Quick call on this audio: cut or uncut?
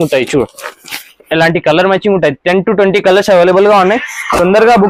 uncut